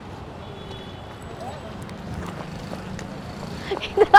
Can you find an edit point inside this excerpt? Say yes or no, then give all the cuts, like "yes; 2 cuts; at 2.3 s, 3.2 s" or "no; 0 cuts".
no; 0 cuts